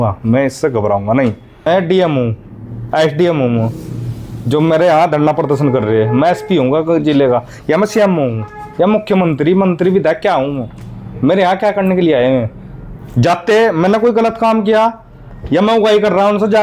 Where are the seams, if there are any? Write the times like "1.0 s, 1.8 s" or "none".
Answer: 1.7 s